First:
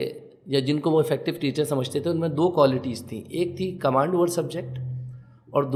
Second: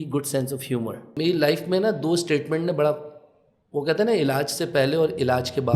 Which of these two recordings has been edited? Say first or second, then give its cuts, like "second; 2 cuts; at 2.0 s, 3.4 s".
second; 1 cut; at 1.2 s